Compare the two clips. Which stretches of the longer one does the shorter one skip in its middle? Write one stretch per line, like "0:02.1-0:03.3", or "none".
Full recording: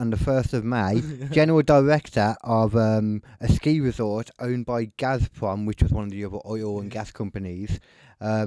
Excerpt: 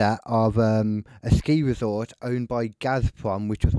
none